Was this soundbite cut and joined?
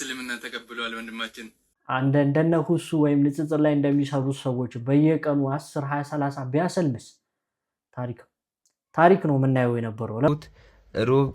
yes; 2 cuts; at 1.7 s, 10.3 s

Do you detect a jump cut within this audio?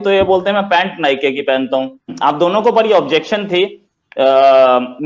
yes; 1 cut; at 2.0 s

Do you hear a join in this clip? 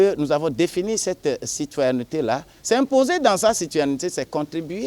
yes; 1 cut; at 2.5 s

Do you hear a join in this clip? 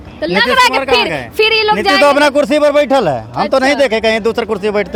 no; 0 cuts

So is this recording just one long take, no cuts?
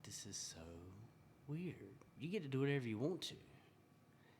no; 1 cut; at 2.0 s

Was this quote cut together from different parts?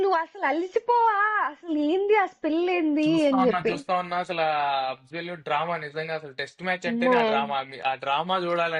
no; 0 cuts

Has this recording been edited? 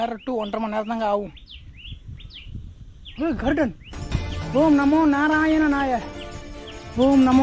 no; 0 cuts

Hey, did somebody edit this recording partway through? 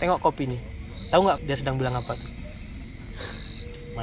yes; 2 cuts; at 1.4 s, 2.8 s

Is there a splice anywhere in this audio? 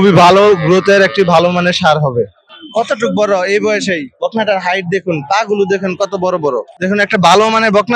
yes; 2 cuts; at 2.5 s, 6.7 s

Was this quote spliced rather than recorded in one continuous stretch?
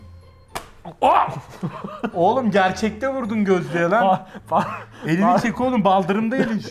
no; 0 cuts

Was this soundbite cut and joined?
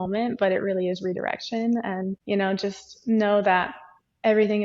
yes; 1 cut; at 2.2 s

